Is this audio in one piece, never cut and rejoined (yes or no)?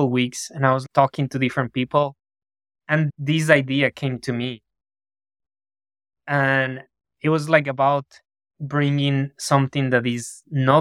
no